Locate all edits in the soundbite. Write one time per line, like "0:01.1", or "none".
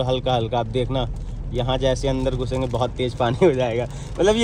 none